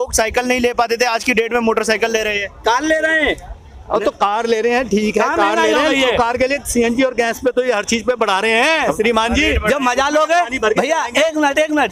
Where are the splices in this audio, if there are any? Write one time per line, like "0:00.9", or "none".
none